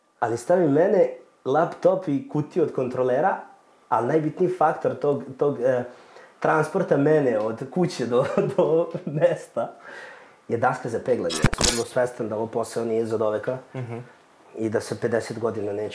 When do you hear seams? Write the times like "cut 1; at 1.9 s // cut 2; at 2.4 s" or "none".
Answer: cut 1; at 11.5 s